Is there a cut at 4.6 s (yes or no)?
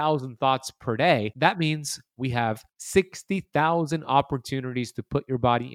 no